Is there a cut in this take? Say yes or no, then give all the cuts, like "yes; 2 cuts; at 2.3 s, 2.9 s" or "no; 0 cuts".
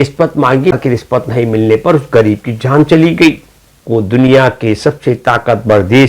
yes; 2 cuts; at 0.8 s, 3.8 s